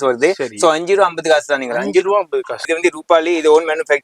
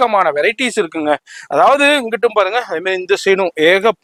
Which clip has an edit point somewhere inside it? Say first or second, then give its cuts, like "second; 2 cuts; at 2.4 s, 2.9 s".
first; 1 cut; at 2.6 s